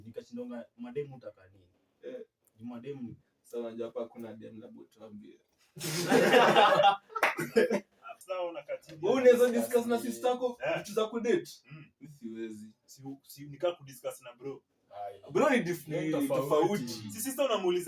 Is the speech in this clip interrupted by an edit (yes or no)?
yes